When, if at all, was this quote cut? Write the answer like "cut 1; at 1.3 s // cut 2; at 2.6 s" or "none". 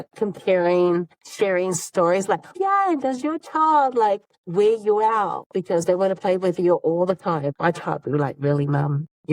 cut 1; at 1.2 s // cut 2; at 2.6 s // cut 3; at 4.3 s